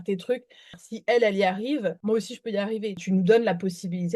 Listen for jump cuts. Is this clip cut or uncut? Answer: cut